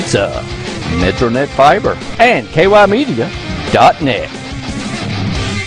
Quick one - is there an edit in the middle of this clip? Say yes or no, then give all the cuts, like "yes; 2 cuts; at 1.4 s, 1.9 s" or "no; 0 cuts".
yes; 1 cut; at 2.0 s